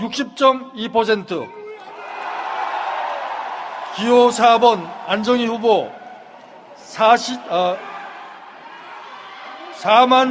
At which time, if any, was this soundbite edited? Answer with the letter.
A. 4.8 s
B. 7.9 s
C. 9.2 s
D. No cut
C